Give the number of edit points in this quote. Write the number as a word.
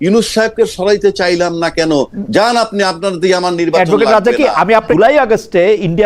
one